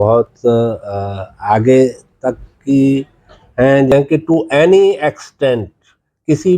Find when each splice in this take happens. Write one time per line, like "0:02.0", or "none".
0:03.9